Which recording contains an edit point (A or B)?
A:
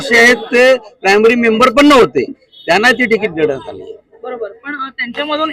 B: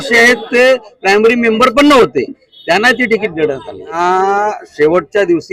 B